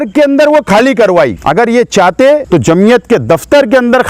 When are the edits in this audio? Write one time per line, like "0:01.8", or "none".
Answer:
0:01.4
0:02.4